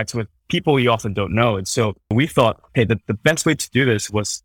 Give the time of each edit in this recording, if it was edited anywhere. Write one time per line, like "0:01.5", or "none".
0:02.1